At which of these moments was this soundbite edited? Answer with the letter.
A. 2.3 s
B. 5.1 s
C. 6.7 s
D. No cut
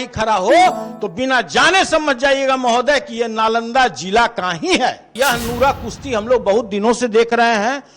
B